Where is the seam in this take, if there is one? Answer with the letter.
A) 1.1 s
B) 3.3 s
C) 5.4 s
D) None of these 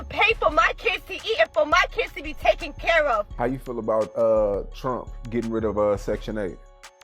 B